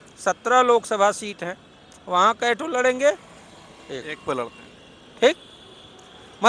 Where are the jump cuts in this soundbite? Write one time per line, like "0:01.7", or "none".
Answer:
none